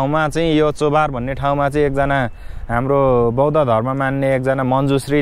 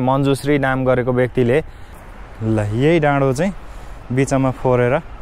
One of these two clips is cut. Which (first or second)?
second